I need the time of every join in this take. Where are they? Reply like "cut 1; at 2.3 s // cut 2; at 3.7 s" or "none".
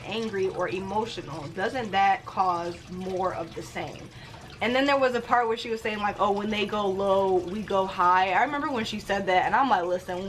cut 1; at 4.2 s